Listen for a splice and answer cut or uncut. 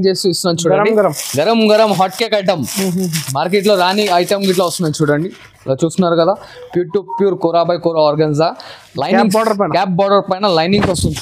uncut